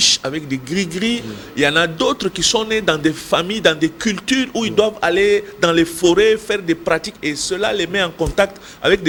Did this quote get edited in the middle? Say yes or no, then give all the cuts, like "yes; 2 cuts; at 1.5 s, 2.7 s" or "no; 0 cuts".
no; 0 cuts